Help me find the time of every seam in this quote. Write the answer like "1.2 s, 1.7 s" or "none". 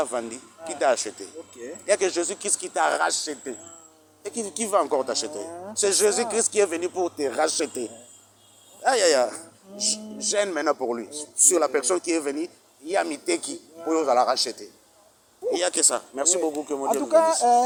none